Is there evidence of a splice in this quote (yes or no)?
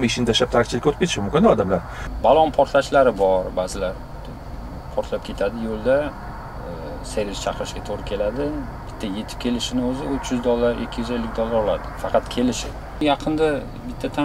yes